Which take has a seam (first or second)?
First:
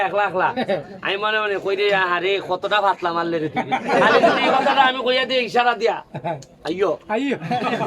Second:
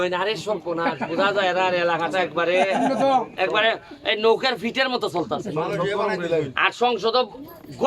first